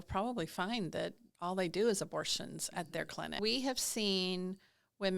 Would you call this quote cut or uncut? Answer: cut